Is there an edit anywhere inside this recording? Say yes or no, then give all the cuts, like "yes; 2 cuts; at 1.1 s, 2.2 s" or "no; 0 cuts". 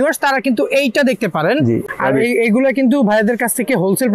yes; 1 cut; at 1.9 s